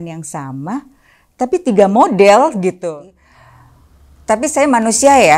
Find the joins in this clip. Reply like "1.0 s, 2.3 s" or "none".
2.8 s